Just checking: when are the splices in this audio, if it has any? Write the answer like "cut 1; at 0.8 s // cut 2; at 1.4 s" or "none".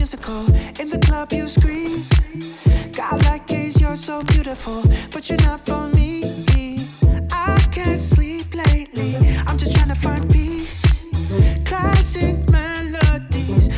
none